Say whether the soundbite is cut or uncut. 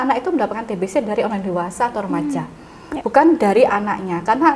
uncut